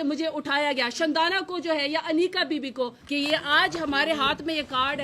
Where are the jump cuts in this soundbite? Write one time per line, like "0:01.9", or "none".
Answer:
0:03.0